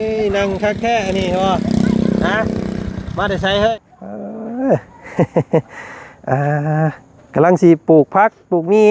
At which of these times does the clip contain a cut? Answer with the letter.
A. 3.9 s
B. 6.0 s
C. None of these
A